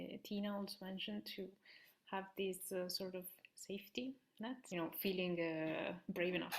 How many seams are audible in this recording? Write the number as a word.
one